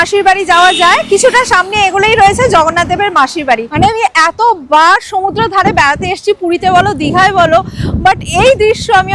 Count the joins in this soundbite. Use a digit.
1